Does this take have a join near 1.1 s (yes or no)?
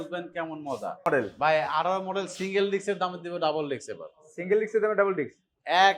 yes